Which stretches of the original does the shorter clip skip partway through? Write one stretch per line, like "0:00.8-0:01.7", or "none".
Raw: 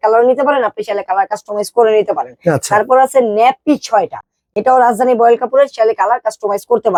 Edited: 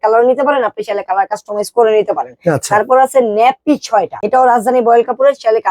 0:04.2-0:04.5

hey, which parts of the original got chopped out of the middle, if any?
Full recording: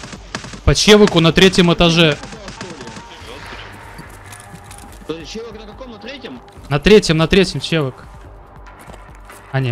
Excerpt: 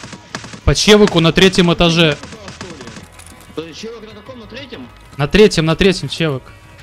0:03.1-0:04.6

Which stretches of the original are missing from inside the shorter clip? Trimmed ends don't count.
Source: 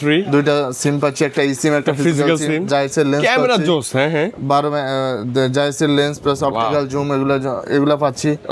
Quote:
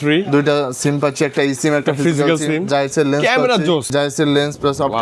0:03.9-0:05.5

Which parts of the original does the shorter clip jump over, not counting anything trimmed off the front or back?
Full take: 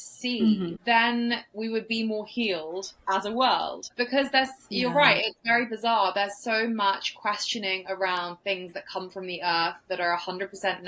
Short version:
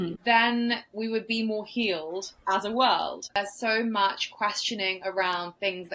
0:03.9-0:06.2

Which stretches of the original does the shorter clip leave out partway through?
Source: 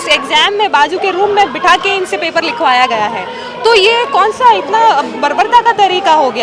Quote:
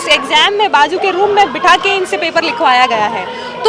none

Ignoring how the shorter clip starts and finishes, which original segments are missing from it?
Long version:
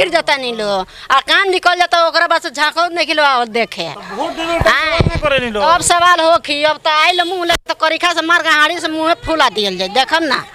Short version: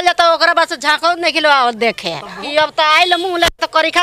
0:04.2-0:06.5

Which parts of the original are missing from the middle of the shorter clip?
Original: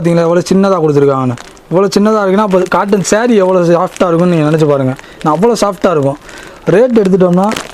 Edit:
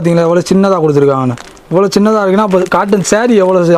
none

